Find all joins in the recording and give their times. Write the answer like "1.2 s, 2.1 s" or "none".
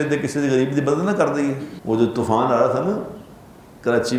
1.7 s